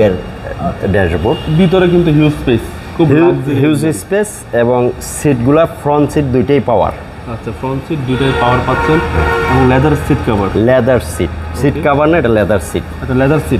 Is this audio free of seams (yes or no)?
yes